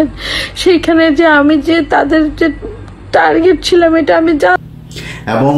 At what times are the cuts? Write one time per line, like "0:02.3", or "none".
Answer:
0:04.6